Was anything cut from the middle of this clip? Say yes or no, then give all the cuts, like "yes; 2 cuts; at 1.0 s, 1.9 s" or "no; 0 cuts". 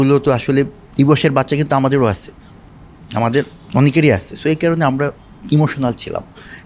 no; 0 cuts